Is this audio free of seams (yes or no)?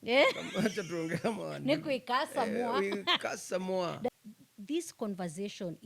no